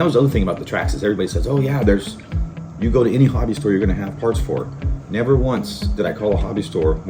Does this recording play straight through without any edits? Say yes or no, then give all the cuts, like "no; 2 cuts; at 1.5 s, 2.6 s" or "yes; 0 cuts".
yes; 0 cuts